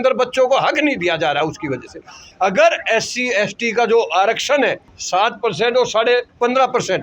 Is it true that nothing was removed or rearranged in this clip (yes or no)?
no